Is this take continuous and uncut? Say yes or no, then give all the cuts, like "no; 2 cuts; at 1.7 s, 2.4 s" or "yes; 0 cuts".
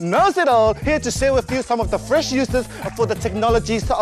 yes; 0 cuts